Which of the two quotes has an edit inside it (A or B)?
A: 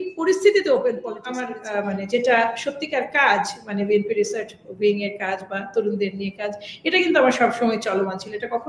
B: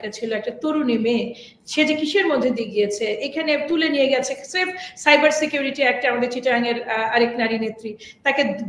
A